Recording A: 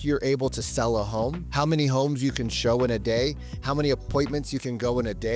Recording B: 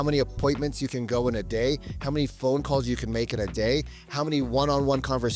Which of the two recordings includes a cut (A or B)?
A